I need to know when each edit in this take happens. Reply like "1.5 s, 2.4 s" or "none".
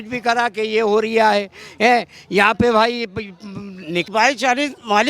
4.1 s